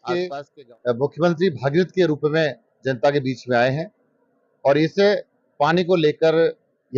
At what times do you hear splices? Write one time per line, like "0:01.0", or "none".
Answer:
none